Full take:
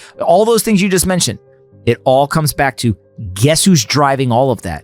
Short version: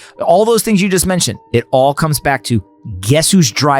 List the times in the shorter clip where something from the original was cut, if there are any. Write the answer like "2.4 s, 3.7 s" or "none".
1.3 s